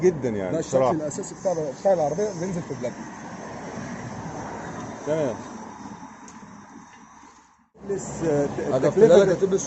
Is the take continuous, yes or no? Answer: no